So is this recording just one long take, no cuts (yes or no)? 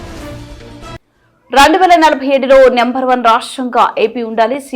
no